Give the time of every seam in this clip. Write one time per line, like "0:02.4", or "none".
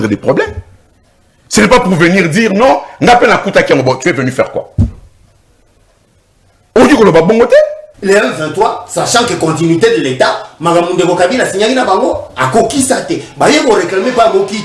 0:07.9